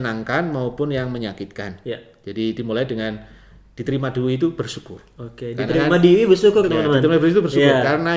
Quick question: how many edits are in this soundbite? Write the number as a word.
zero